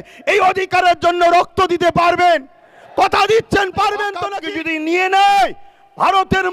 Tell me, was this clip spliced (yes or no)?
yes